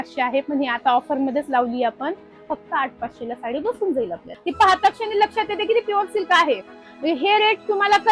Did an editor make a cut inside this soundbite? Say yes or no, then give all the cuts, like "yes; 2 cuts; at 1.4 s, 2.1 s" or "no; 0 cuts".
yes; 2 cuts; at 4.2 s, 6.6 s